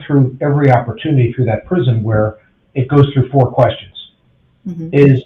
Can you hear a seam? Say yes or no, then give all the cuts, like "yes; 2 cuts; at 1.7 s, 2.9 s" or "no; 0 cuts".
no; 0 cuts